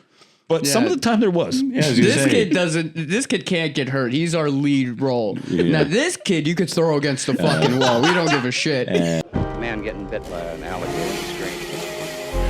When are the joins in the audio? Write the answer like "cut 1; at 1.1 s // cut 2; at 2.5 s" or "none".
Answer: cut 1; at 9.2 s